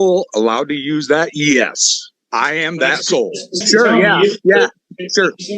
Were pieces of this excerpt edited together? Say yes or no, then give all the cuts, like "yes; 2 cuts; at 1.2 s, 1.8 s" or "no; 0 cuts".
yes; 1 cut; at 3.6 s